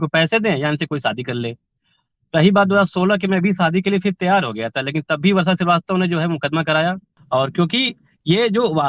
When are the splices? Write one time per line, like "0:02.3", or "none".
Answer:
0:07.1